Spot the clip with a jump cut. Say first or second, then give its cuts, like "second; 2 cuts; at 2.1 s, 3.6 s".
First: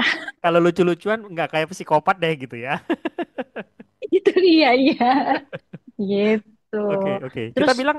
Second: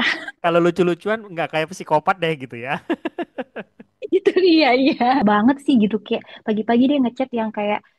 second; 1 cut; at 5.2 s